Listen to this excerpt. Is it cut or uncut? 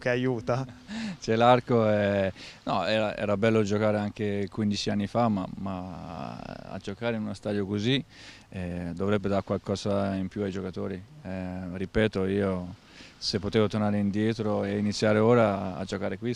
uncut